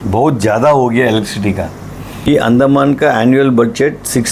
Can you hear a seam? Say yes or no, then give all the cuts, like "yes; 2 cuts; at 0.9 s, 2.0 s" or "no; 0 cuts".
yes; 1 cut; at 2.1 s